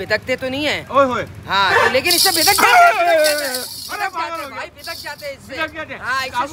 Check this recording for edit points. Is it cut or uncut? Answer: uncut